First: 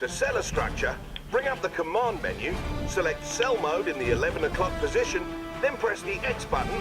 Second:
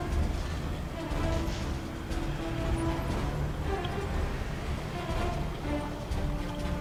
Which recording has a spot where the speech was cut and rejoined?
first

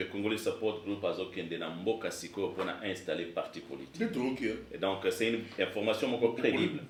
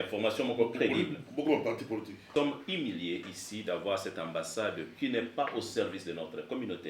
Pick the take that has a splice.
second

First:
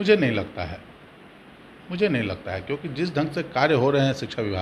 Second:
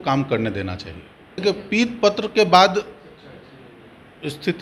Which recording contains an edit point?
second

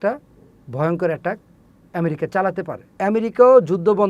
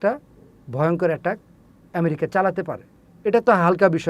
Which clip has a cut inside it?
first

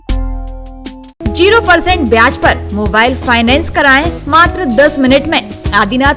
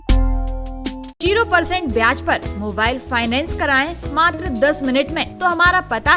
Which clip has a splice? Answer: second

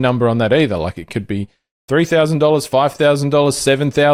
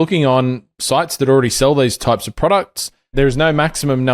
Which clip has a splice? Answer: second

